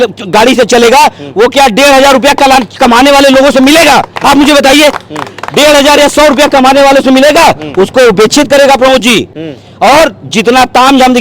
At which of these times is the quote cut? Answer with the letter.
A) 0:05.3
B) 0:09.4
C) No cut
C